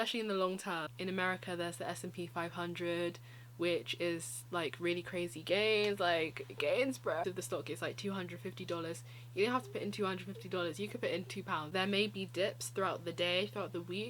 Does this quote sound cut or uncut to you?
cut